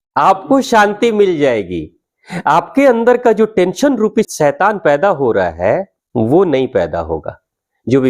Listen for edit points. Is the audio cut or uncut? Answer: cut